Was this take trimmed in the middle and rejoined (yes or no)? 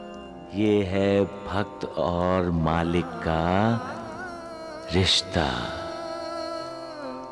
no